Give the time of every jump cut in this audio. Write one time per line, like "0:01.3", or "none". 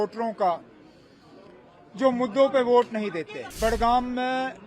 0:03.4

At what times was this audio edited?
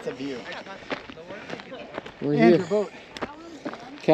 none

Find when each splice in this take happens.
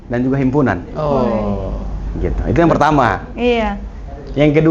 none

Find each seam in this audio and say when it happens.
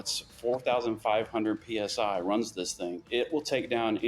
0:03.0

